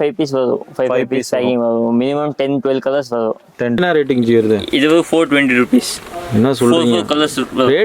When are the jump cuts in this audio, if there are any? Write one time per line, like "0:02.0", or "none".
0:03.8